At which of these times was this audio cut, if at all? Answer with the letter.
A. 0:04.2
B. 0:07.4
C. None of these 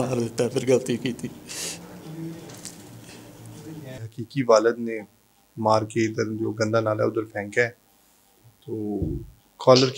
A